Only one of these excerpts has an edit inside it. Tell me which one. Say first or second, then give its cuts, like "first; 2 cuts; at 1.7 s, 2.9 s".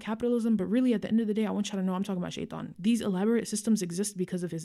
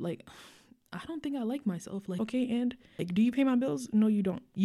second; 2 cuts; at 2.1 s, 3.0 s